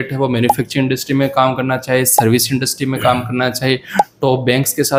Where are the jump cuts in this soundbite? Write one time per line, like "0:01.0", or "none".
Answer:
none